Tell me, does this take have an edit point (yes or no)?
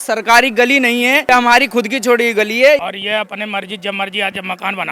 yes